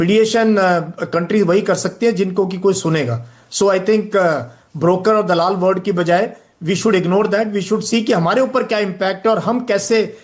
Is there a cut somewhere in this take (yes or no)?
no